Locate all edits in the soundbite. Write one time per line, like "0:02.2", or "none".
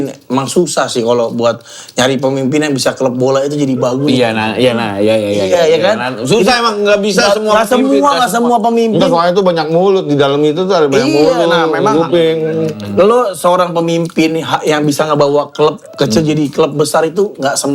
none